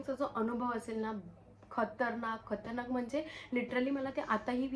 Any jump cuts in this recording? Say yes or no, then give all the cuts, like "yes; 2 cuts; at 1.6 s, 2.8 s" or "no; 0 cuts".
no; 0 cuts